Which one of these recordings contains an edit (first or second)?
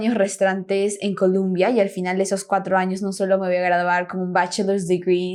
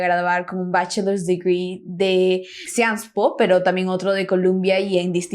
second